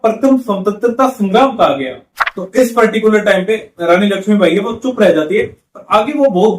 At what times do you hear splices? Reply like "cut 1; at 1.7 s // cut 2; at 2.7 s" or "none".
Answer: cut 1; at 2.3 s